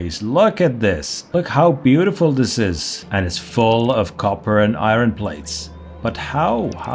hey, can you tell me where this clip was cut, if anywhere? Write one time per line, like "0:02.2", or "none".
0:01.2
0:03.0